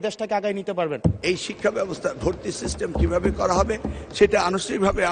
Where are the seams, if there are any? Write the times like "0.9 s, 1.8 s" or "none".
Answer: 1.2 s